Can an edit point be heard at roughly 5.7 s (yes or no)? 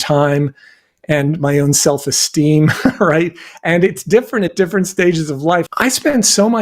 yes